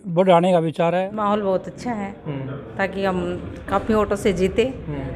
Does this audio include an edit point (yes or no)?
yes